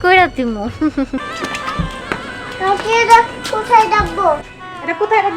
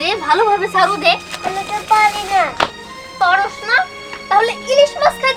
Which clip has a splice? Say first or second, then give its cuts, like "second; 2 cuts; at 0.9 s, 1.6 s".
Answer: first; 1 cut; at 1.3 s